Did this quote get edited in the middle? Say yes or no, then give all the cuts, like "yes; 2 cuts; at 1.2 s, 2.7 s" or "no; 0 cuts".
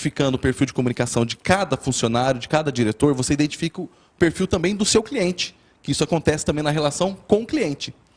no; 0 cuts